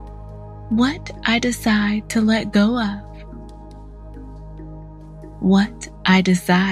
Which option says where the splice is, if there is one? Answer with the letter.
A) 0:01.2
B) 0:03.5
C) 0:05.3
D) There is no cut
D